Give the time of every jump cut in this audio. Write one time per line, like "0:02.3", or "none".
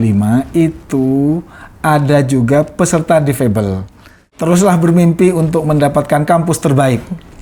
0:04.3